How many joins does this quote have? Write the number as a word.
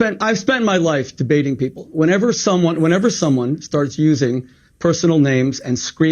zero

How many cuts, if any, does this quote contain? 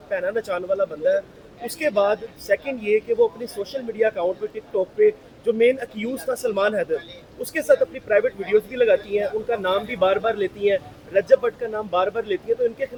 zero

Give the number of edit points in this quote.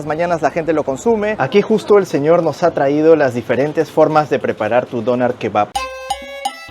two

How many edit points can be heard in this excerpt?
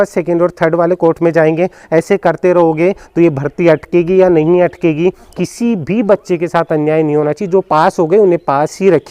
one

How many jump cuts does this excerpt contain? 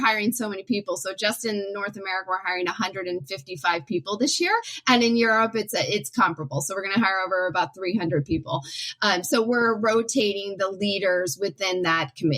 one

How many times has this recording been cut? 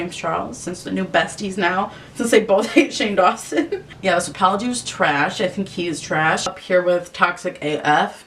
two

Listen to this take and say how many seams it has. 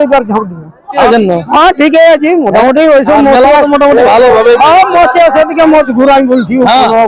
one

